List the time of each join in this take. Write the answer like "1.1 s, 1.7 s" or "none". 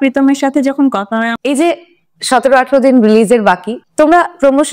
1.3 s